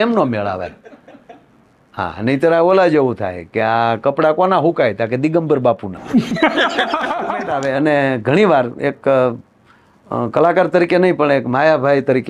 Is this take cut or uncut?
cut